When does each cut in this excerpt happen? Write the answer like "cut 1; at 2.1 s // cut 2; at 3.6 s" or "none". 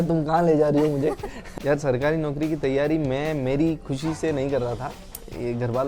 cut 1; at 1.3 s